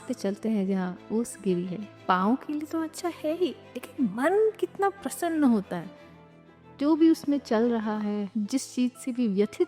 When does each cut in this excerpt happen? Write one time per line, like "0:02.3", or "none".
0:02.0
0:08.3